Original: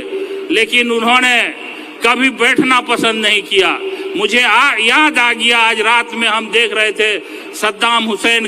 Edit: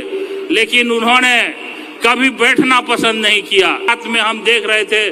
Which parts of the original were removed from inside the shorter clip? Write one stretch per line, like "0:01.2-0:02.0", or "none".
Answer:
0:03.9-0:06.0